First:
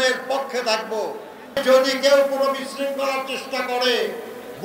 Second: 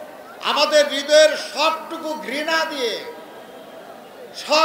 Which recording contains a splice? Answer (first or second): first